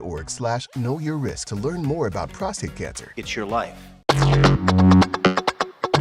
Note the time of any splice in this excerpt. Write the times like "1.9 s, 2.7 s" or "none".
1.4 s, 3.0 s, 4.1 s